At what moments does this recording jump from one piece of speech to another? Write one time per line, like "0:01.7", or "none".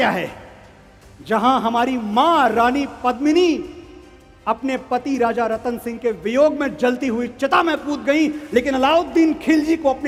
none